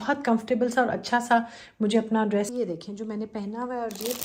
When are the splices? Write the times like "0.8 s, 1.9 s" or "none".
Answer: 2.5 s